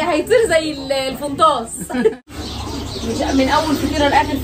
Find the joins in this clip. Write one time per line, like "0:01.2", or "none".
0:02.1